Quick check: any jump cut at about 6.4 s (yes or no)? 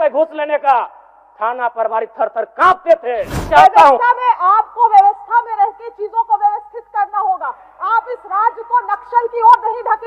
no